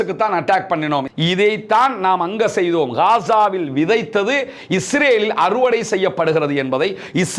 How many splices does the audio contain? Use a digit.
1